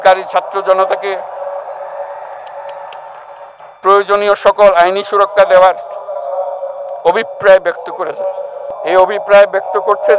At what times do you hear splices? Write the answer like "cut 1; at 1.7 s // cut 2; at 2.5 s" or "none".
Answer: cut 1; at 8.7 s